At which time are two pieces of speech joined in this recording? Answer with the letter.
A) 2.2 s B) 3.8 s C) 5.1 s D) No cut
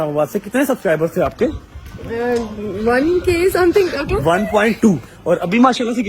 C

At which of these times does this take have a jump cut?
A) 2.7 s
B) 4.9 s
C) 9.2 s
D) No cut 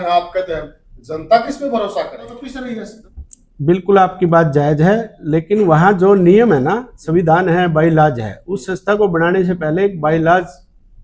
D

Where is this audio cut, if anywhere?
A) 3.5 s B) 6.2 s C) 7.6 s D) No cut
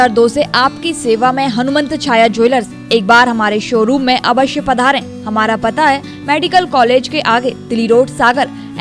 D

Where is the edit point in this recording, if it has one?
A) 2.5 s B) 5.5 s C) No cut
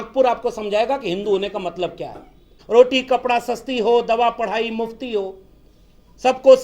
A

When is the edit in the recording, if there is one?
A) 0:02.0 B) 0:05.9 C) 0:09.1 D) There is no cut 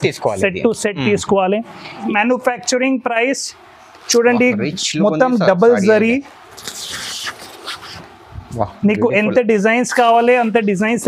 A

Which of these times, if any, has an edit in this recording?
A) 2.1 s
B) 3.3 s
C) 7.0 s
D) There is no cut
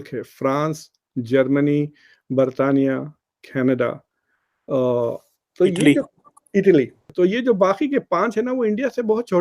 C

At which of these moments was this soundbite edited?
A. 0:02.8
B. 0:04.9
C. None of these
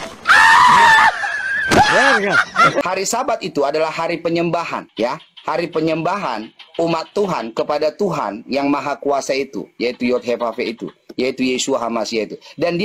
A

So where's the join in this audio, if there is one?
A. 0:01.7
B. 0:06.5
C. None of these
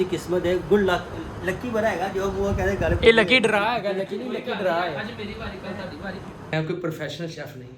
B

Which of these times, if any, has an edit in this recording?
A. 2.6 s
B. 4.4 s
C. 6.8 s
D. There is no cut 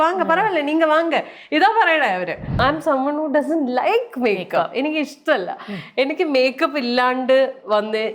A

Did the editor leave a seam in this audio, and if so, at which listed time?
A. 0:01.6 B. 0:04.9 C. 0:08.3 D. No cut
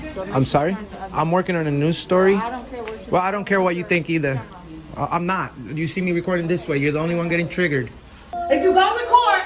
C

